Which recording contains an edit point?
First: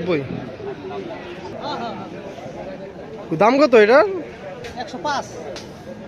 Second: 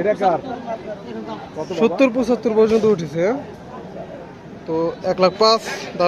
first; 1 cut; at 1.6 s

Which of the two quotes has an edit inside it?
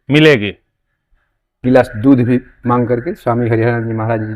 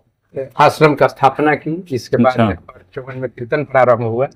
first; 1 cut; at 1.6 s

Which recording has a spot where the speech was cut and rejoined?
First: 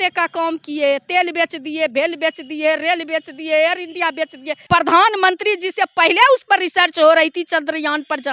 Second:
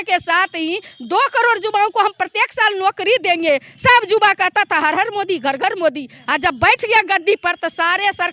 first; 1 cut; at 4.7 s

